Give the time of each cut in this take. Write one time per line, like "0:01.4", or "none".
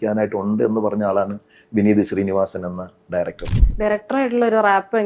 0:03.4